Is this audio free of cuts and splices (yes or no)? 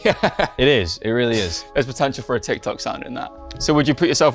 no